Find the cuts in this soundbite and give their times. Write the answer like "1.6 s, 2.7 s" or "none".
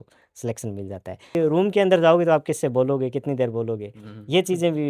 1.4 s

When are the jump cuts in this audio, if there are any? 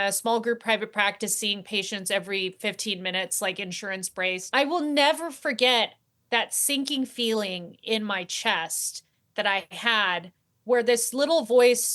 4.4 s

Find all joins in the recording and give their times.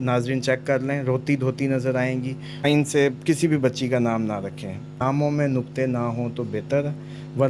2.6 s, 4.9 s

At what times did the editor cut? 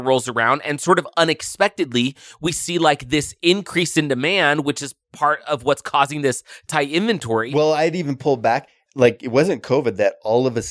8.0 s

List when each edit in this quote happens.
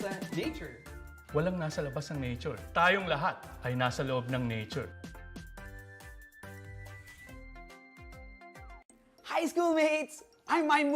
8.8 s

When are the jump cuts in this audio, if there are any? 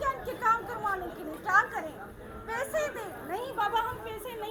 none

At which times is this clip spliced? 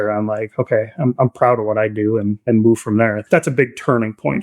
2.4 s, 3.2 s

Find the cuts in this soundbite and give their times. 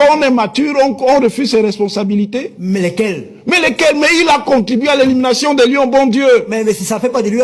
none

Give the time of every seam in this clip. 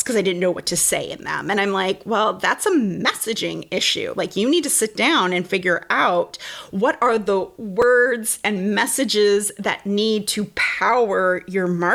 none

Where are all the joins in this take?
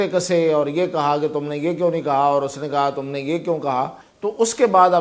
4.0 s

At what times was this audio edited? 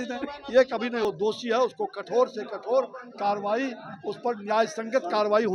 1.1 s

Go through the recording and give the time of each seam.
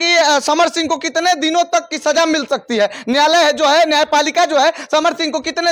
none

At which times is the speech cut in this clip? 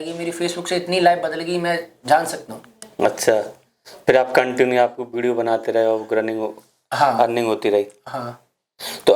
none

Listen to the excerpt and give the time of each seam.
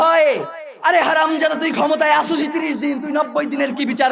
none

